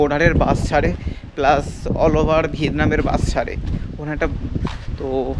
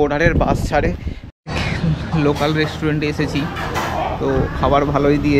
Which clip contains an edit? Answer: second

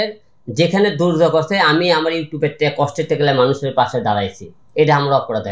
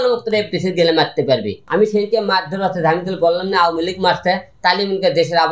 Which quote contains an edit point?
second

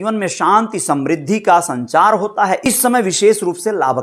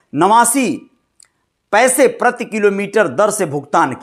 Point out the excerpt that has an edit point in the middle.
first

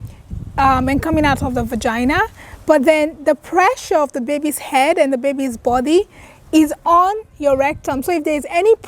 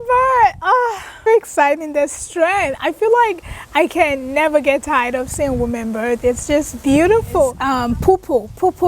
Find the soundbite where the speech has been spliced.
second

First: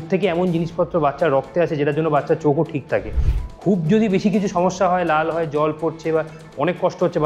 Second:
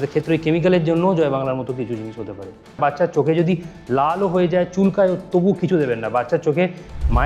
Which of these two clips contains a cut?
second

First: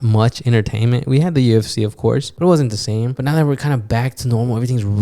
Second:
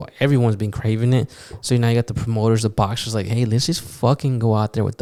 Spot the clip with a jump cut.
first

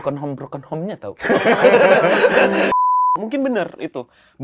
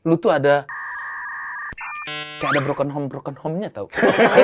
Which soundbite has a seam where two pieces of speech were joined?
first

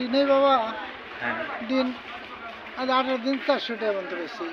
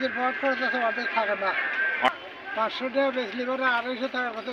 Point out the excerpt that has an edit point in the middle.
second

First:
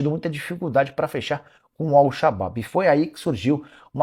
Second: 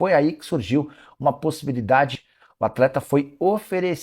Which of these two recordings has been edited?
second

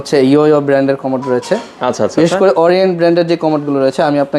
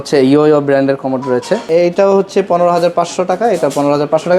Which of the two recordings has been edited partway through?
second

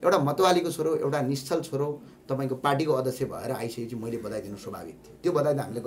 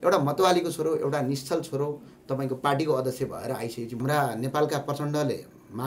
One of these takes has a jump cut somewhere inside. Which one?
second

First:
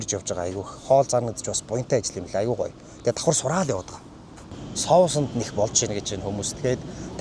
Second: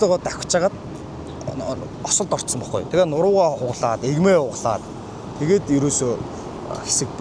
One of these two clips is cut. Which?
first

